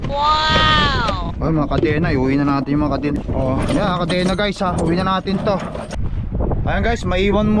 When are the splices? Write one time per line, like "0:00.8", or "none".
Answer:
0:03.2
0:05.9